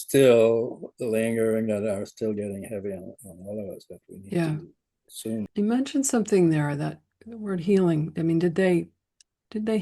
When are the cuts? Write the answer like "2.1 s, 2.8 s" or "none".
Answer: 5.5 s